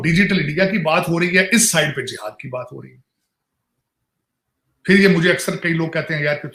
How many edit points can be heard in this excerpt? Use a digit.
0